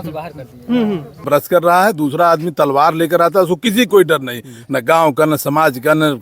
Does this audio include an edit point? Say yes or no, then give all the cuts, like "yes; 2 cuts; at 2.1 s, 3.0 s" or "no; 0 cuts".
yes; 1 cut; at 1.2 s